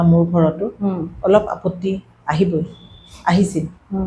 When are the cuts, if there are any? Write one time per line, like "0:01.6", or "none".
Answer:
none